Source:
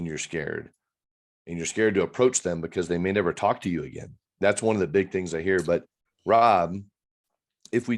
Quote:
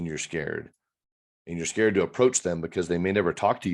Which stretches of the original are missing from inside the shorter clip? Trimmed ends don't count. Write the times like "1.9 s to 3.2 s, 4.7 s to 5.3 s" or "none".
none